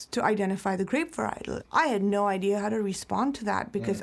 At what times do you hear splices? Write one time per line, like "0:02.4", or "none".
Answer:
0:01.5